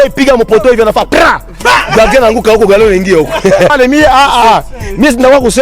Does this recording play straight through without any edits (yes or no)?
no